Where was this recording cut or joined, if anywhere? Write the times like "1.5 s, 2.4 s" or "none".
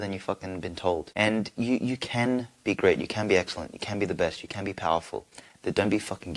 1.1 s